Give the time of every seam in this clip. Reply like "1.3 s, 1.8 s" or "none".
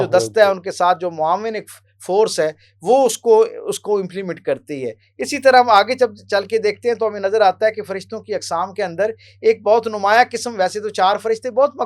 none